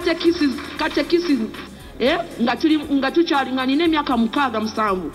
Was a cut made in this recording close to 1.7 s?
yes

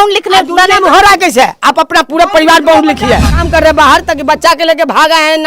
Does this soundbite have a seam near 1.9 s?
no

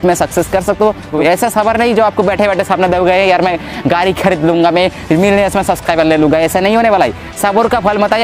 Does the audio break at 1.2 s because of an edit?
yes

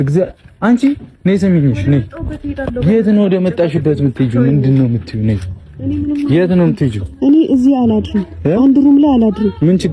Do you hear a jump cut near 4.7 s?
no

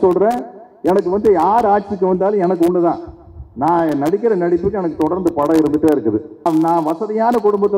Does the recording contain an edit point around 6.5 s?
yes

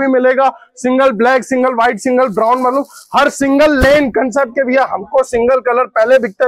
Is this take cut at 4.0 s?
no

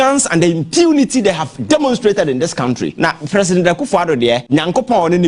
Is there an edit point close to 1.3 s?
no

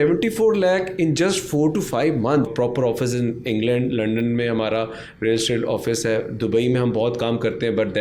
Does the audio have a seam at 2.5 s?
yes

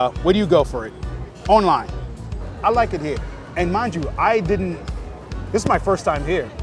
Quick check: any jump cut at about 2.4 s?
yes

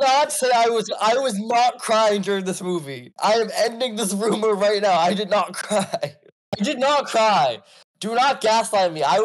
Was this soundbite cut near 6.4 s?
yes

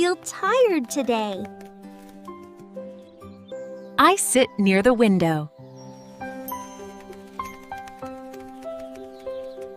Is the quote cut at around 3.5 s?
yes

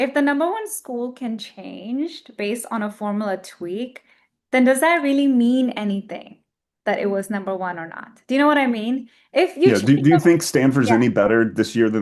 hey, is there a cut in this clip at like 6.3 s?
no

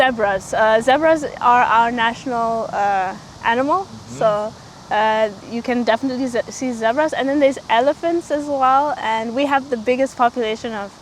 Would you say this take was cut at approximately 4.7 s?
no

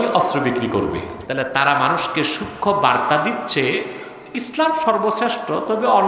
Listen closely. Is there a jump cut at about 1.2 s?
yes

